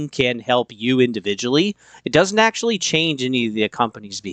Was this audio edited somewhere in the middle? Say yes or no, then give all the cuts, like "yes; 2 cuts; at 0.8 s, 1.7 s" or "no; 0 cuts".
no; 0 cuts